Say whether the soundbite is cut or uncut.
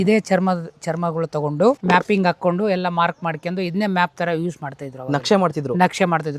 uncut